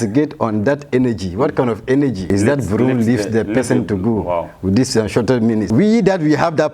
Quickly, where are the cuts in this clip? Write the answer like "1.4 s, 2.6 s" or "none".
2.2 s, 5.7 s